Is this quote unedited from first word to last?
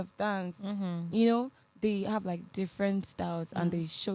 yes; 0 cuts

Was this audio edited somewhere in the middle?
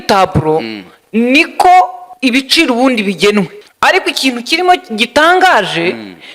yes; 2 cuts; at 2.0 s, 3.6 s

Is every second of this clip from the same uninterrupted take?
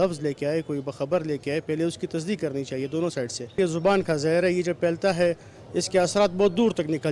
yes; 0 cuts

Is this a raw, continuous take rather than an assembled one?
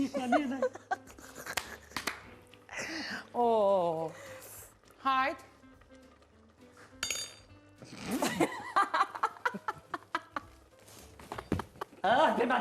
yes; 0 cuts

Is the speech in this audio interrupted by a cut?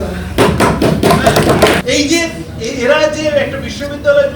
yes; 1 cut; at 1.8 s

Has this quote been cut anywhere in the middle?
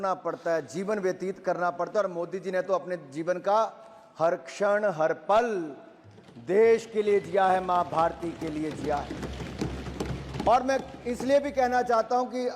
no; 0 cuts

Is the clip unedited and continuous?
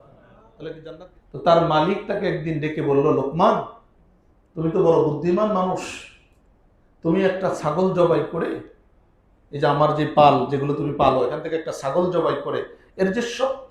no; 1 cut; at 1.0 s

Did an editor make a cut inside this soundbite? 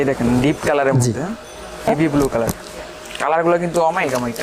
yes; 1 cut; at 1.9 s

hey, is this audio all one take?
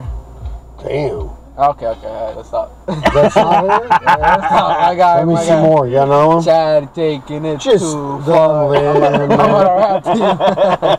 yes; 0 cuts

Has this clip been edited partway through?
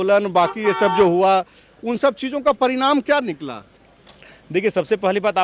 no; 0 cuts

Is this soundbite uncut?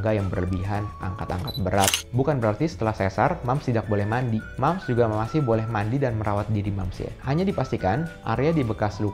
no; 1 cut; at 1.9 s

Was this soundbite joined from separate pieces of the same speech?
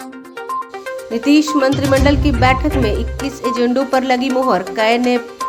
no; 0 cuts

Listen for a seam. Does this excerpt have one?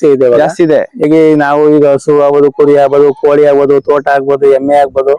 yes; 1 cut; at 1.0 s

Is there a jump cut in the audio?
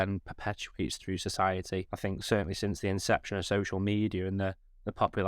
yes; 1 cut; at 1.9 s

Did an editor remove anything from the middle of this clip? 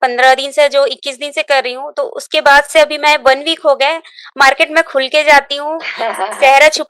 no; 0 cuts

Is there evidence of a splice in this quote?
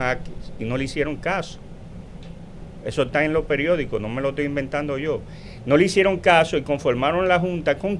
no; 0 cuts

